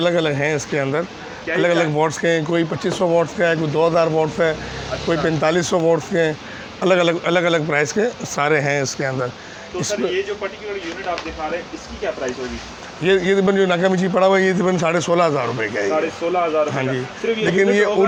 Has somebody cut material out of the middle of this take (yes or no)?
no